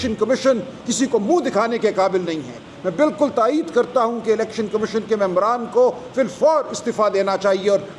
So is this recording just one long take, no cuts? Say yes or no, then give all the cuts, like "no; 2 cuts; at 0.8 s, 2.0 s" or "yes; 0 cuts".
yes; 0 cuts